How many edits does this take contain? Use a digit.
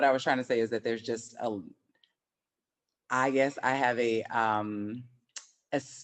0